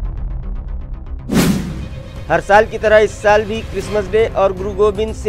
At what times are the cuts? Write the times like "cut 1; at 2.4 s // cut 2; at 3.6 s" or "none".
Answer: cut 1; at 2.0 s